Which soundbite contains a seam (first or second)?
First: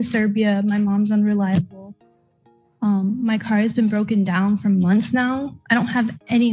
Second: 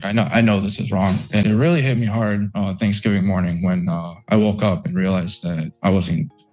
second